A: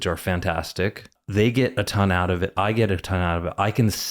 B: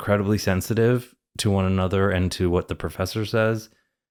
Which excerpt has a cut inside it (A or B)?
A